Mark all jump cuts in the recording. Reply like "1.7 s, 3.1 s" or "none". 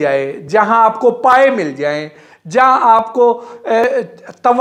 none